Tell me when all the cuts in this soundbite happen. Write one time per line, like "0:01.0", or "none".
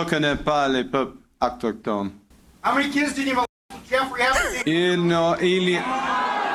none